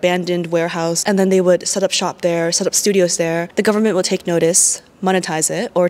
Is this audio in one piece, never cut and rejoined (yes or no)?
no